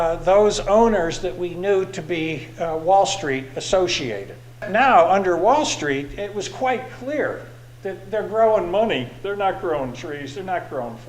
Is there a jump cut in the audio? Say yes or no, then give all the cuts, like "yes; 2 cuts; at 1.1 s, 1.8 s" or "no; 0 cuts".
yes; 1 cut; at 4.7 s